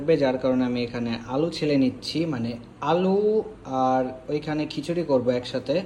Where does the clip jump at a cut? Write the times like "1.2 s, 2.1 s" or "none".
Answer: none